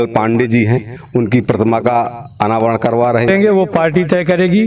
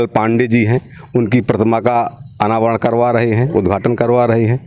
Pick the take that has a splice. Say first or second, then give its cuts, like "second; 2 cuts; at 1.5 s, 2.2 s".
first; 1 cut; at 3.3 s